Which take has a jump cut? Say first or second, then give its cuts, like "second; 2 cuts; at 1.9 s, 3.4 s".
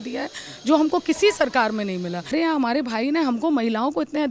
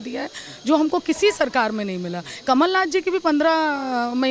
first; 1 cut; at 2.3 s